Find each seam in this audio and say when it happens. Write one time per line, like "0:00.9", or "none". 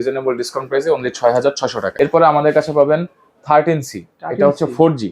0:01.6